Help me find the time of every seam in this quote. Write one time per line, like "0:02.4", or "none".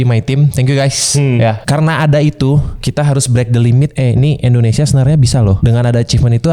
0:01.6
0:02.8
0:03.9
0:05.6